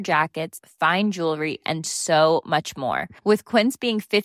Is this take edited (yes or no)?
no